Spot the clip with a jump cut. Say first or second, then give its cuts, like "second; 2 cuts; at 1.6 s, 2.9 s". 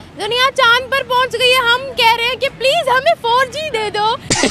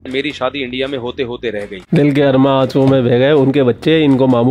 second; 1 cut; at 1.8 s